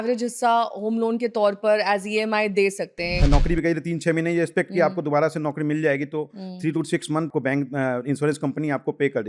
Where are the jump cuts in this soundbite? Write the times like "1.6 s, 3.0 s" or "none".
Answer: 3.2 s, 7.3 s